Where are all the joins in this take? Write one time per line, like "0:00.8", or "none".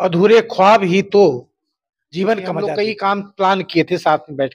0:02.7